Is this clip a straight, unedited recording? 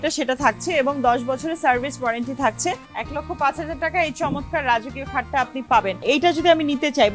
no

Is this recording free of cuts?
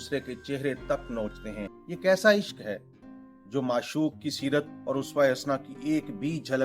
no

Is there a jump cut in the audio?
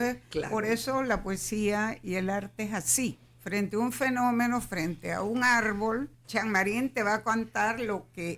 yes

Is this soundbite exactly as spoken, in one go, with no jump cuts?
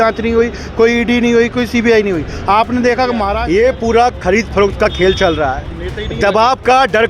no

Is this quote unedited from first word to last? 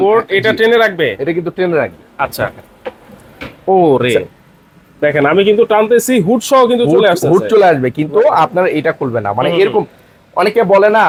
yes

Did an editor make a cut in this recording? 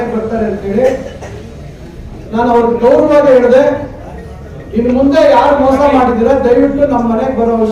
no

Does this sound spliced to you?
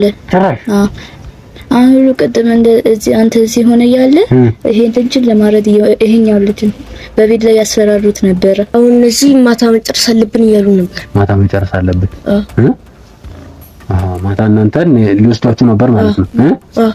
yes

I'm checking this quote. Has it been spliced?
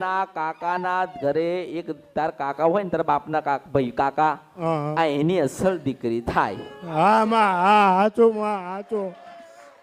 no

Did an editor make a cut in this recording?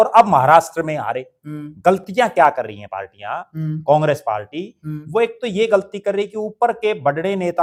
no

